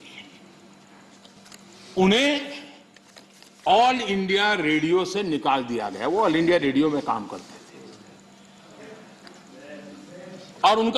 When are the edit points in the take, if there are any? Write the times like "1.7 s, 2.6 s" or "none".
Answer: 1.4 s